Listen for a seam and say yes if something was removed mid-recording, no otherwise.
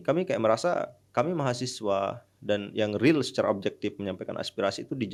no